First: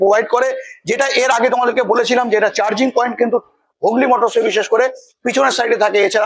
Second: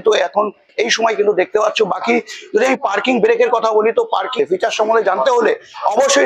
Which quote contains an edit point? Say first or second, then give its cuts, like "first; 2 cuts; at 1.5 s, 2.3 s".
second; 1 cut; at 4.4 s